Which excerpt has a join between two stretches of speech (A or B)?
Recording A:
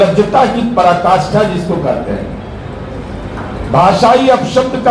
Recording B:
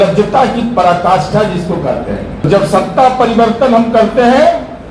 B